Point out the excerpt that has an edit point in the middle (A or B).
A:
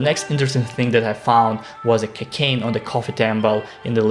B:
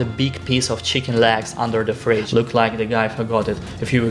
B